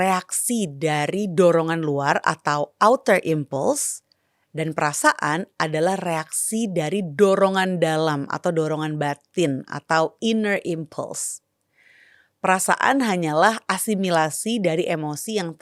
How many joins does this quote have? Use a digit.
0